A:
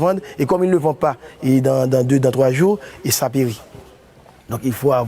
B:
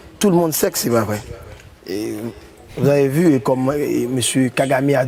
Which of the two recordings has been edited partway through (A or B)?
A